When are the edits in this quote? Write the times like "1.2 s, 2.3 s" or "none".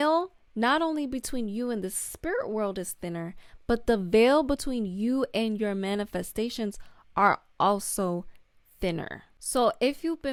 none